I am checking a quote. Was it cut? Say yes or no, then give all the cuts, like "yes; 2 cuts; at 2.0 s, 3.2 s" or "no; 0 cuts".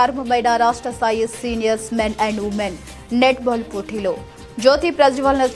no; 0 cuts